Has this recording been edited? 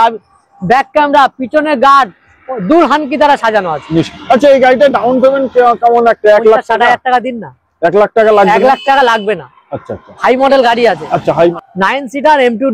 yes; 1 cut; at 11.5 s

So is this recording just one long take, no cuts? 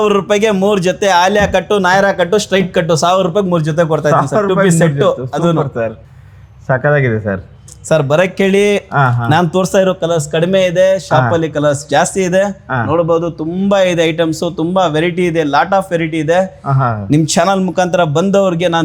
yes; 0 cuts

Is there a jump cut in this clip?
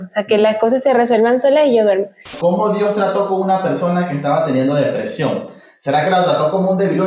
yes; 1 cut; at 2.3 s

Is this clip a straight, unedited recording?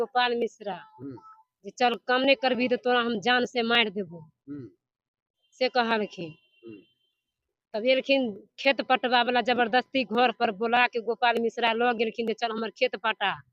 yes; 0 cuts

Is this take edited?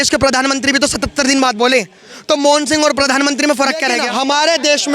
yes; 1 cut; at 4.0 s

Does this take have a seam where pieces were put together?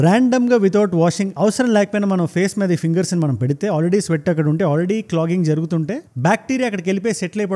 no; 0 cuts

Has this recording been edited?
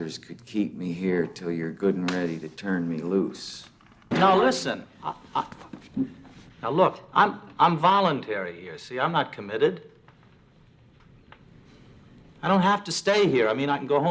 yes; 1 cut; at 4.1 s

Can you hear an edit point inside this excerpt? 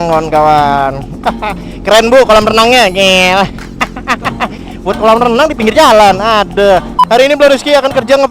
yes; 1 cut; at 7.0 s

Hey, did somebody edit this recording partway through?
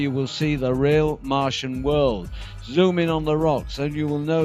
yes; 1 cut; at 2.0 s

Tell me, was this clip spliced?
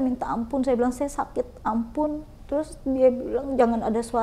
no; 0 cuts

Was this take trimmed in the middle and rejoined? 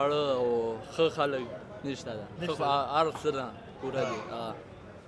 no; 0 cuts

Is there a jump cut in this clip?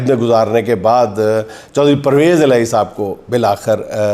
no; 0 cuts

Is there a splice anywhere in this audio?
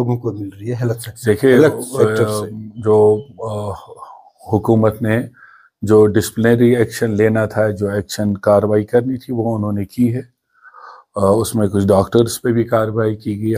no; 0 cuts

